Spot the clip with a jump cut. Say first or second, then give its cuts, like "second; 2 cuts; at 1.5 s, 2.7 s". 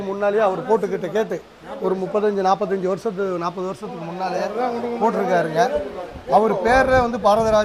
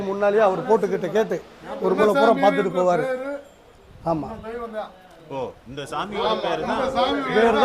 second; 1 cut; at 2.0 s